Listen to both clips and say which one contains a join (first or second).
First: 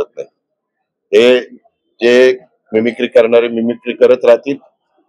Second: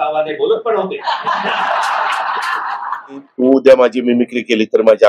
second